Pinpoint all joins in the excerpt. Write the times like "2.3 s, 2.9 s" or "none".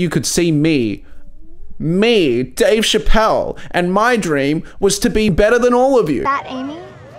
5.3 s, 6.2 s